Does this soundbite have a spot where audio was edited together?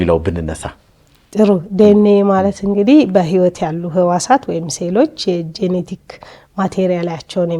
no; 0 cuts

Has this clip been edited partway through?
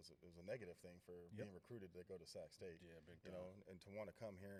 no; 0 cuts

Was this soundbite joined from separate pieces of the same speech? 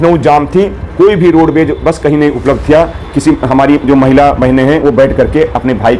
no; 0 cuts

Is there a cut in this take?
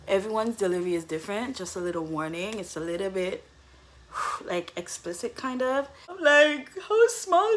yes; 1 cut; at 6.1 s

